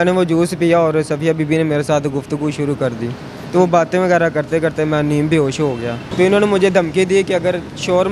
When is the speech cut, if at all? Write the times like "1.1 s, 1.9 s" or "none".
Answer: 6.0 s